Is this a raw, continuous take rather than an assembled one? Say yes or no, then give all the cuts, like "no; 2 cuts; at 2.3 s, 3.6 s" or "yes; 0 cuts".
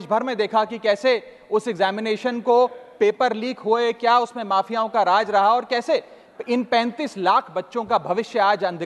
yes; 0 cuts